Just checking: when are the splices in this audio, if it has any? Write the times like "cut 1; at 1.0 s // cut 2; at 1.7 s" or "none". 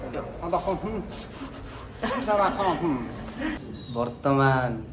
cut 1; at 3.3 s